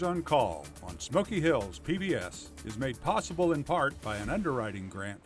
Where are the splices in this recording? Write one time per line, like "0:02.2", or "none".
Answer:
none

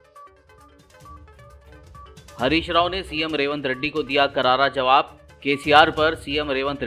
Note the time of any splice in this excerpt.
0:01.1

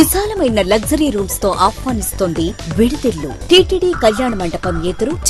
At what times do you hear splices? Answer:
0:03.4

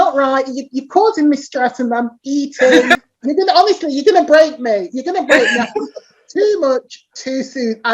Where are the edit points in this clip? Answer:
0:03.0

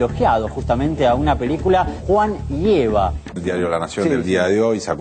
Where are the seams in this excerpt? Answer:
0:02.0
0:03.2

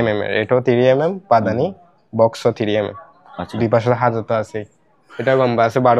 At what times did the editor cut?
none

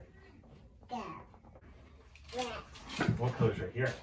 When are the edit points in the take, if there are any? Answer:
0:01.6

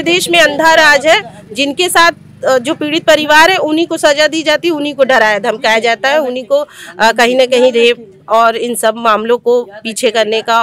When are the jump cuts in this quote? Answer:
none

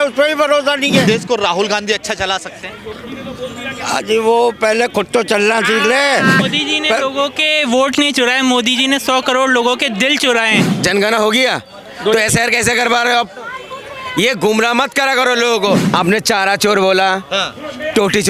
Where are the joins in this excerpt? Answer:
0:01.0
0:06.4
0:10.7
0:15.8

